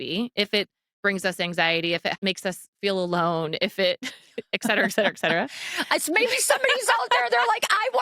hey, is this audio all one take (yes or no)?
no